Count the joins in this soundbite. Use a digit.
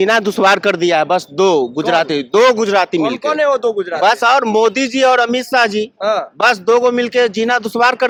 0